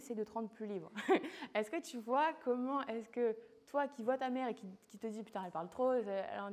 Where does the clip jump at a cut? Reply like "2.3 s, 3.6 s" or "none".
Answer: none